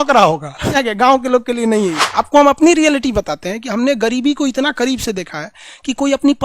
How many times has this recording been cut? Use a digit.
2